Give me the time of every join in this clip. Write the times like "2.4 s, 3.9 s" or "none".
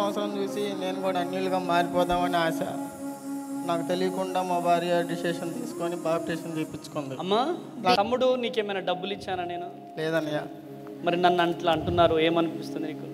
8.0 s